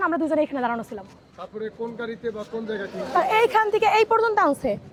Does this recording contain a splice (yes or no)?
no